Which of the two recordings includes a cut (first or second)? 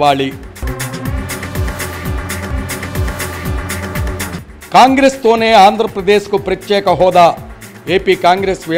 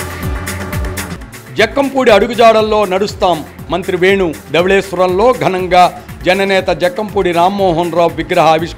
second